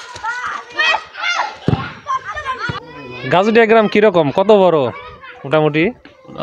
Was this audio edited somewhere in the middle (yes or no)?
yes